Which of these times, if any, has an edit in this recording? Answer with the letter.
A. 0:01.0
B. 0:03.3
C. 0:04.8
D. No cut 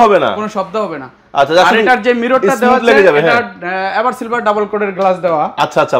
D